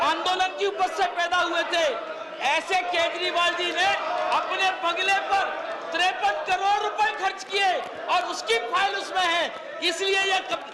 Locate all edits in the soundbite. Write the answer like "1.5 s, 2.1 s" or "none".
none